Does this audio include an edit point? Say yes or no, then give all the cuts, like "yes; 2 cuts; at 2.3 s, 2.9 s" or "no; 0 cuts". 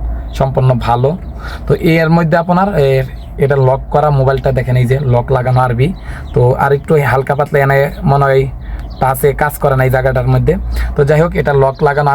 no; 0 cuts